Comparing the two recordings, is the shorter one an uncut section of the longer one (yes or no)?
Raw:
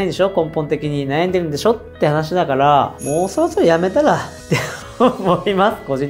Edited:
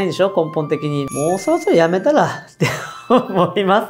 no